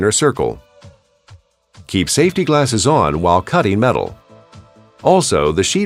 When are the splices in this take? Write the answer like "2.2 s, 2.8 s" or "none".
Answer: none